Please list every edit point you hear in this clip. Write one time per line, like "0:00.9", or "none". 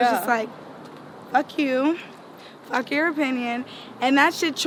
none